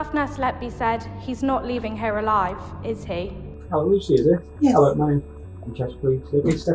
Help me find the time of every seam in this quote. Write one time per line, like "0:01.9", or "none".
0:03.2